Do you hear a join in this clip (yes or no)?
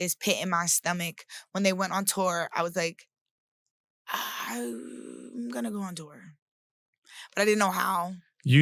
no